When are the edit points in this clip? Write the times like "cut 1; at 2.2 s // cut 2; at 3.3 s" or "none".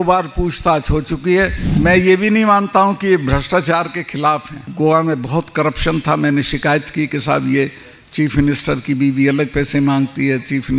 cut 1; at 1.6 s // cut 2; at 4.6 s